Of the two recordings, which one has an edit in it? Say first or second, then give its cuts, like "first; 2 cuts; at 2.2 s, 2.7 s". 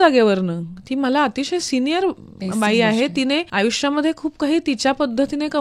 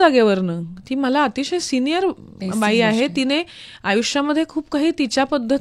first; 1 cut; at 3.5 s